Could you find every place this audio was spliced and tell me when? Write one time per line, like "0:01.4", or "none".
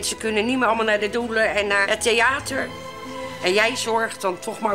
0:01.8